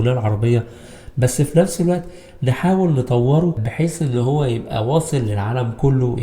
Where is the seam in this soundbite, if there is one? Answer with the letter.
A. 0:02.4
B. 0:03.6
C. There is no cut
B